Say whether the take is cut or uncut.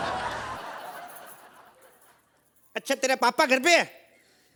uncut